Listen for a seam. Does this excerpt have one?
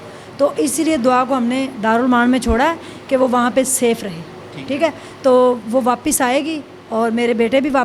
no; 0 cuts

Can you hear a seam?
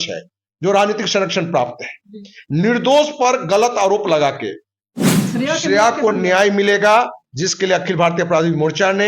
yes; 1 cut; at 5.2 s

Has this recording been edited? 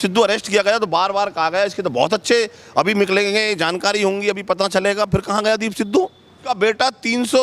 yes; 1 cut; at 6.5 s

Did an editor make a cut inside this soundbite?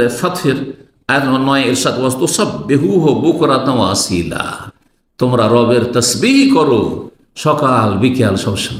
no; 0 cuts

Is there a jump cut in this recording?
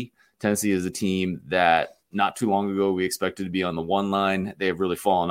no; 0 cuts

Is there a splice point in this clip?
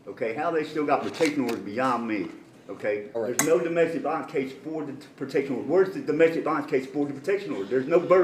yes; 1 cut; at 3.2 s

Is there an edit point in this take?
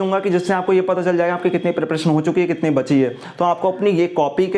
no; 0 cuts

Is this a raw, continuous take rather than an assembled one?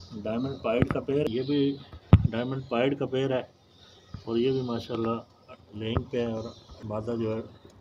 no; 2 cuts; at 1.3 s, 6.7 s

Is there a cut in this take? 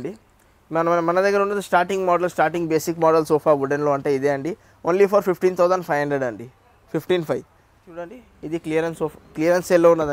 no; 0 cuts

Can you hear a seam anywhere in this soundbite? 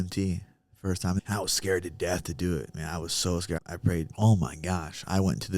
yes; 2 cuts; at 1.2 s, 3.6 s

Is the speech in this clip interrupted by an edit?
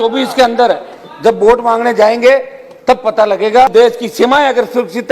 yes; 1 cut; at 3.7 s

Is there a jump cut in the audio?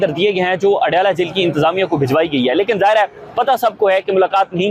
no; 0 cuts

